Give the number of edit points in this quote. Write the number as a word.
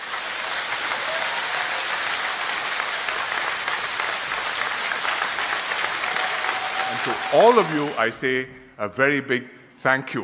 one